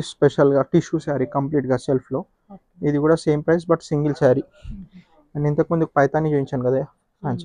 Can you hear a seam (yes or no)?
no